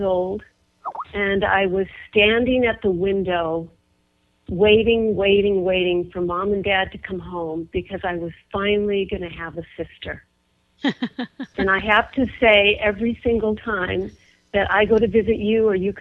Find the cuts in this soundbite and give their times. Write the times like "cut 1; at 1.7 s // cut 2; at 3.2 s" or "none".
cut 1; at 3.2 s